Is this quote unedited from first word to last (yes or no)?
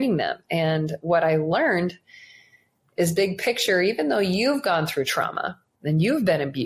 yes